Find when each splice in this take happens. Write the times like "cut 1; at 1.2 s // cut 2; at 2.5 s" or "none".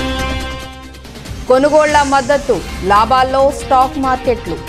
cut 1; at 1.4 s